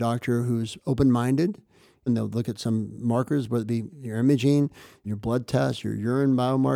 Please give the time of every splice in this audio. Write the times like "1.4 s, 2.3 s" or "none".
2.1 s, 5.0 s